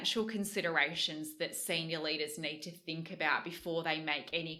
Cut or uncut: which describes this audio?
uncut